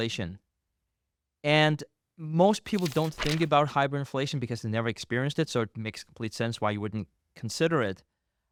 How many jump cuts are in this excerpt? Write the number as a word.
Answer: zero